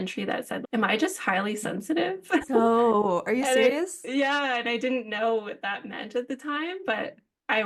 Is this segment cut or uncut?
uncut